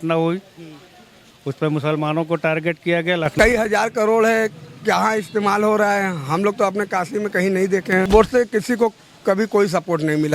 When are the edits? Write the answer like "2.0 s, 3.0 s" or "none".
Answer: 3.3 s, 8.1 s